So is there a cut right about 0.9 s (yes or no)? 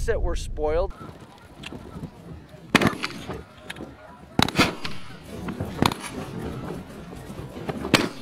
no